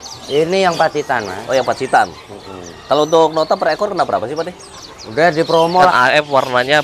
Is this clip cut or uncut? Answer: cut